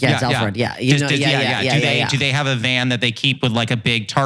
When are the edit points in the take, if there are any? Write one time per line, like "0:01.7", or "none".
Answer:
none